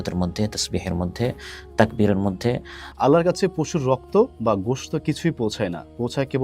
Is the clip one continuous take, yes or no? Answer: no